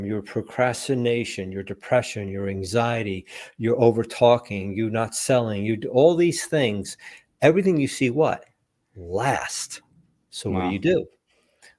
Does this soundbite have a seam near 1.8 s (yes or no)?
no